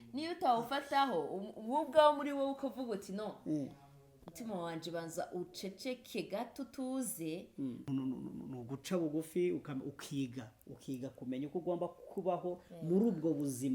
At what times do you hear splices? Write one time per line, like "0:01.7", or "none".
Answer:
0:07.9